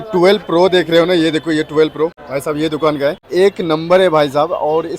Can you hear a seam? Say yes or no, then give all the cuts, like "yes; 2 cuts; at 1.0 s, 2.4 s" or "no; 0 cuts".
yes; 2 cuts; at 2.3 s, 3.2 s